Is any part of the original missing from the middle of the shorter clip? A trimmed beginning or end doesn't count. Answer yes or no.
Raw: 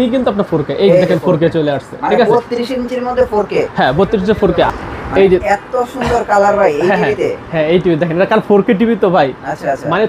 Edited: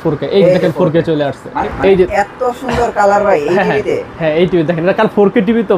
yes